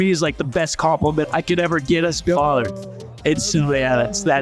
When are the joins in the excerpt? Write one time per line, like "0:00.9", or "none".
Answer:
0:01.2